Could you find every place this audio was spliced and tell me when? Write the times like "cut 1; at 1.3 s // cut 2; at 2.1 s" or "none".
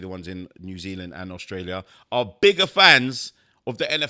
none